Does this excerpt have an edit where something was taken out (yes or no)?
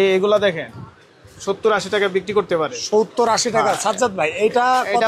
no